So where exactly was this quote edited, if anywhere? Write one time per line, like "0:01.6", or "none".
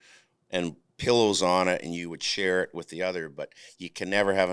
none